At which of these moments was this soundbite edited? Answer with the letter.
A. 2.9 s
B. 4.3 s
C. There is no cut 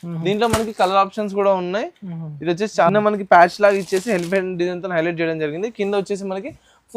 A